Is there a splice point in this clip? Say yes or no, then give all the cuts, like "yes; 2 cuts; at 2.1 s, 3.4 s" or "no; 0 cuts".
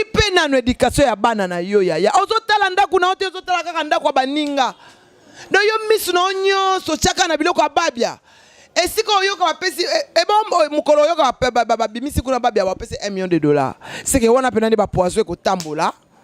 no; 0 cuts